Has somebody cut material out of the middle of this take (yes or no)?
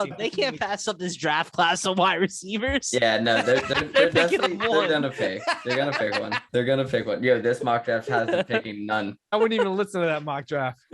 no